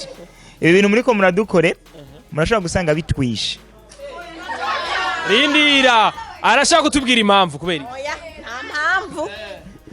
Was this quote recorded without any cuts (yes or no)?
yes